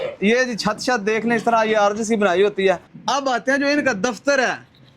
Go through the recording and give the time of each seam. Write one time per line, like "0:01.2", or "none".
0:02.9